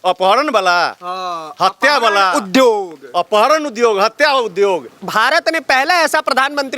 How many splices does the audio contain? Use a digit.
1